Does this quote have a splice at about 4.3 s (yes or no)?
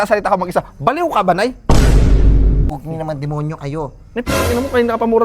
no